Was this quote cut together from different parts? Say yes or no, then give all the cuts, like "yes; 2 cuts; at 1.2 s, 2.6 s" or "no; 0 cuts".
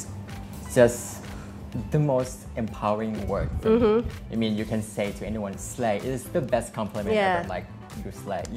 no; 0 cuts